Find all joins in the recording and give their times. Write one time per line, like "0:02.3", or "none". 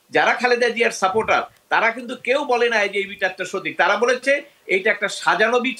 none